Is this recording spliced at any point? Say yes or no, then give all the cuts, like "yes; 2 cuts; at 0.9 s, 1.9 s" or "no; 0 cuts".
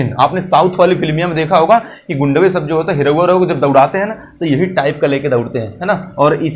no; 0 cuts